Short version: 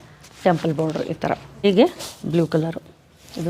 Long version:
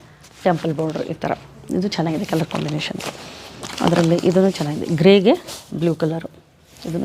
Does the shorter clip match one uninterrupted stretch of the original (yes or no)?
no